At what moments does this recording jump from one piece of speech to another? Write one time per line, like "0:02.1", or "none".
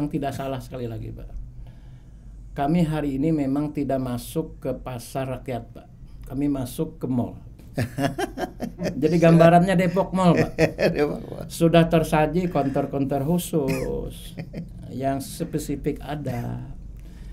none